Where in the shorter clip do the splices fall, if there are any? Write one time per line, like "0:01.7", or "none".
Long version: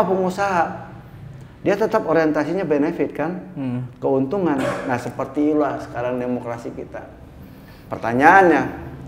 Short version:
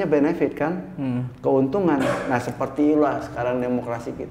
none